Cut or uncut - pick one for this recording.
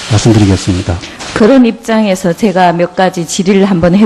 cut